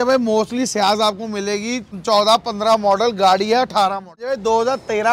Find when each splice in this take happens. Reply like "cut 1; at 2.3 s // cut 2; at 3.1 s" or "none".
cut 1; at 2.0 s // cut 2; at 4.3 s